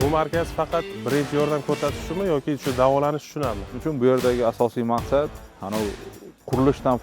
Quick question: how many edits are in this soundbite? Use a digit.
2